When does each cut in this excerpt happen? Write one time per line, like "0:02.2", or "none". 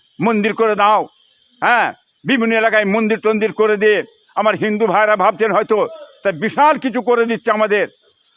none